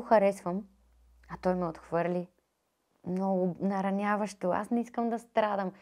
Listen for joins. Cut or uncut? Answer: uncut